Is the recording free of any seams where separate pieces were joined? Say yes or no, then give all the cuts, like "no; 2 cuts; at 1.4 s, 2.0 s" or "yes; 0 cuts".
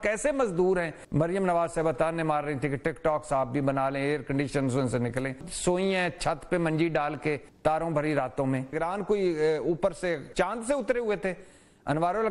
no; 5 cuts; at 1.0 s, 5.5 s, 7.5 s, 8.7 s, 10.2 s